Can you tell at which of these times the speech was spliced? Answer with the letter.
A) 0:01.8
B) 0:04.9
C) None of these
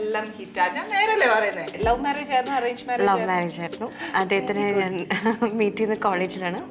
A